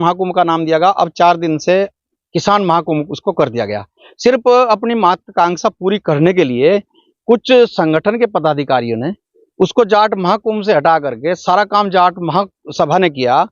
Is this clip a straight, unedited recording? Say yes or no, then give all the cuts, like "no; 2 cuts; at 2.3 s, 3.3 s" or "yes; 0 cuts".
yes; 0 cuts